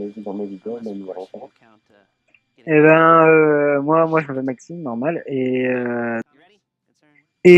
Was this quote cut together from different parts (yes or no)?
no